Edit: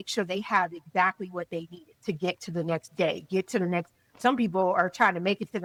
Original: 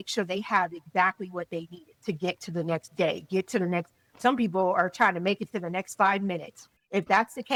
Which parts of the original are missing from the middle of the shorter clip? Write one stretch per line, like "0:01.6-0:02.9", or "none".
none